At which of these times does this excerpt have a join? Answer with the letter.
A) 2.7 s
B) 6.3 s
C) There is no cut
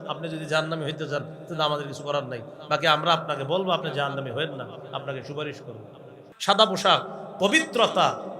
B